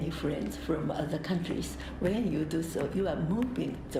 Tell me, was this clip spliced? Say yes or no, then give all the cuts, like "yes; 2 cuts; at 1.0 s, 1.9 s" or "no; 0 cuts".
no; 0 cuts